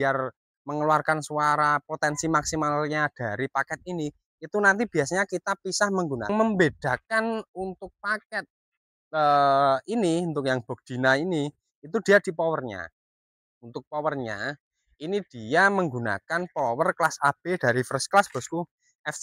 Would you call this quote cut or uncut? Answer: cut